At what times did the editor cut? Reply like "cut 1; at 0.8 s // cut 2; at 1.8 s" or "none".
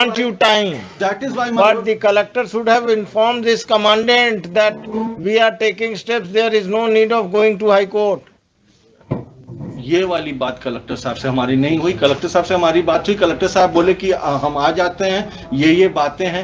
none

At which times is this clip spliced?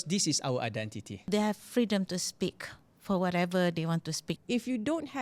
cut 1; at 1.3 s // cut 2; at 4.3 s

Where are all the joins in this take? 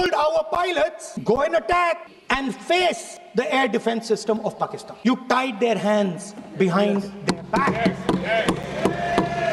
cut 1; at 1.1 s // cut 2; at 2.1 s // cut 3; at 3.1 s // cut 4; at 4.9 s

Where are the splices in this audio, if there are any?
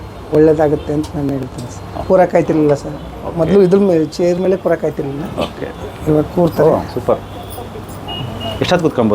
cut 1; at 2.0 s

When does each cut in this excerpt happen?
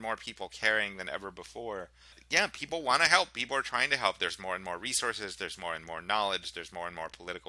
cut 1; at 2.2 s

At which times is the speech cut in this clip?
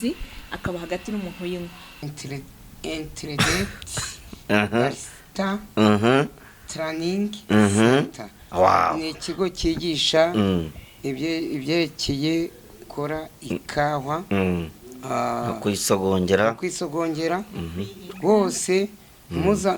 cut 1; at 2.0 s

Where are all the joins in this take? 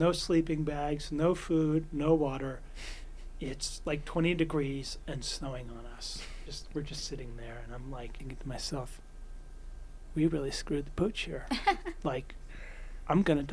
cut 1; at 6.5 s // cut 2; at 8.2 s

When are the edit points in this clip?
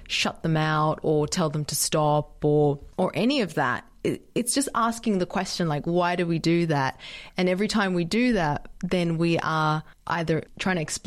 cut 1; at 2.9 s // cut 2; at 9.9 s

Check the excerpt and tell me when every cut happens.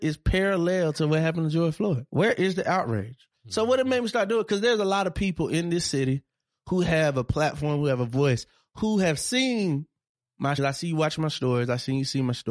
cut 1; at 2.0 s // cut 2; at 10.6 s

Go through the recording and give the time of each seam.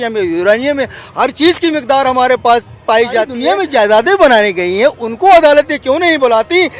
cut 1; at 3.4 s

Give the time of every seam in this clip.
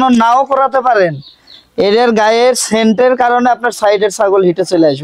none

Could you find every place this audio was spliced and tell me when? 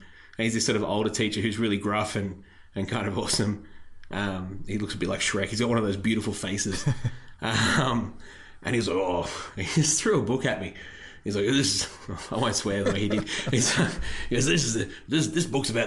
none

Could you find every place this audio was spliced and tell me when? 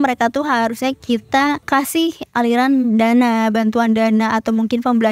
cut 1; at 2.1 s

